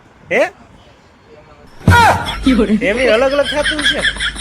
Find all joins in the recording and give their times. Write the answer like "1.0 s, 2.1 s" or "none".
1.8 s, 2.8 s

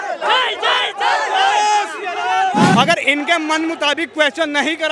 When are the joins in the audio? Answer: 2.7 s

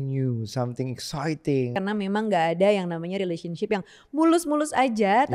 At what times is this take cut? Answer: 1.8 s

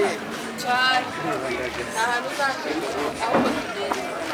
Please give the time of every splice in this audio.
none

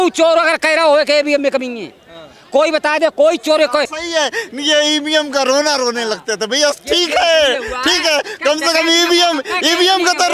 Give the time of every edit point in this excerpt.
4.0 s

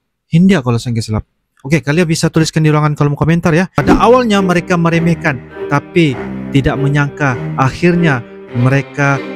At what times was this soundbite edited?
3.7 s

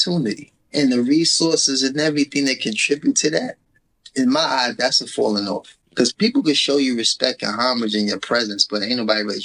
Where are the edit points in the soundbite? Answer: 5.7 s

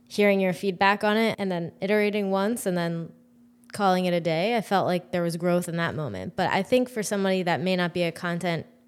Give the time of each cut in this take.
1.3 s

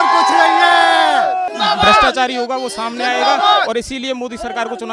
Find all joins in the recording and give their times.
1.5 s

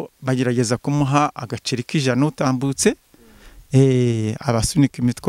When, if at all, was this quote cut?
none

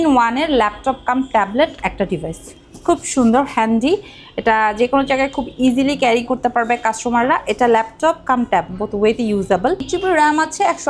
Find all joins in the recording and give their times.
none

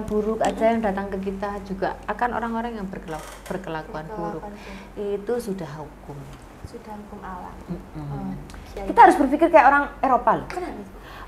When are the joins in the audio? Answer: 8.6 s

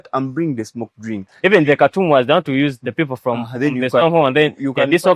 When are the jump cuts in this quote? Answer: 1.3 s

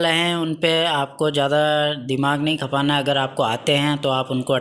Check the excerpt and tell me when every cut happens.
none

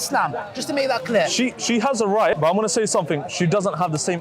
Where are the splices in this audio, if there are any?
2.4 s

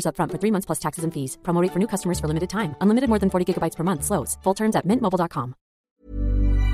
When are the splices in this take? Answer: 5.8 s

